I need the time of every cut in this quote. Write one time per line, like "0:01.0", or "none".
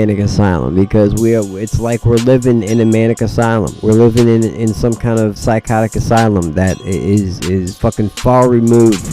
0:03.7
0:05.4
0:06.8
0:07.7

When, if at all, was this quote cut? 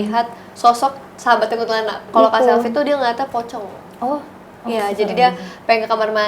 0:02.0

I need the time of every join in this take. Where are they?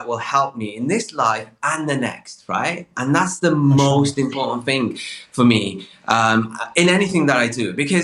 none

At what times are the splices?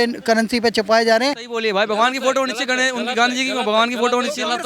0:01.5

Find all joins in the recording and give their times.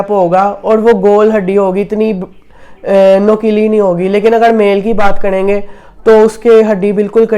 none

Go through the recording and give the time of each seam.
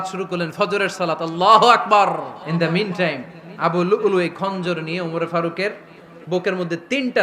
0:02.4

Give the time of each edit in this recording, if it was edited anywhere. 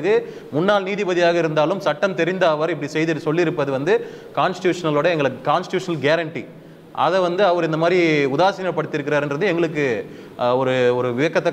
none

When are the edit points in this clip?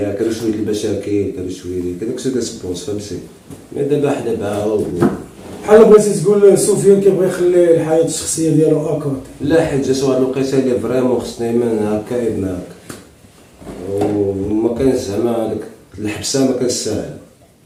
none

